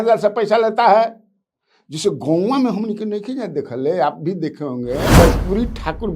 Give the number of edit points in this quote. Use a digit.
1